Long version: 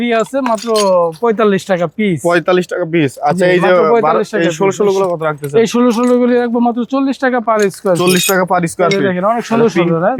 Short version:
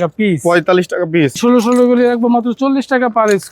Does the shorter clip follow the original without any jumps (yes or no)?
no